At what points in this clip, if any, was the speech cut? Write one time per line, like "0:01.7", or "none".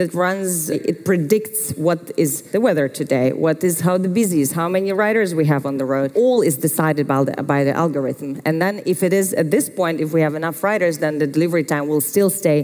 0:00.8
0:02.4
0:06.1